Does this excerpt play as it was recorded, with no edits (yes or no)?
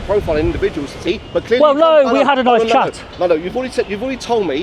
no